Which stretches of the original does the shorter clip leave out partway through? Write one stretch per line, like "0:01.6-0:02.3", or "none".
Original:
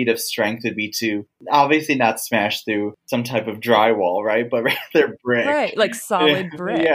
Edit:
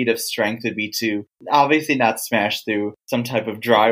none